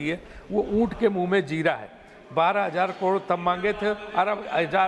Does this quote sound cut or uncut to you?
uncut